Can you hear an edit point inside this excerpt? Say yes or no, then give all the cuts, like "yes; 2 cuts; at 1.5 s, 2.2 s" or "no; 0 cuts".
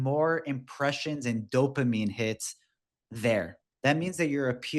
yes; 1 cut; at 3.6 s